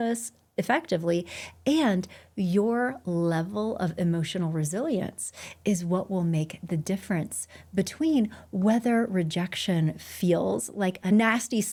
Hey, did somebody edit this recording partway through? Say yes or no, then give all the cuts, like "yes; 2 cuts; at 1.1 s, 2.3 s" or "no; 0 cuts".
no; 0 cuts